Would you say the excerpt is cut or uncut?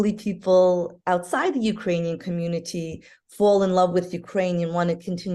uncut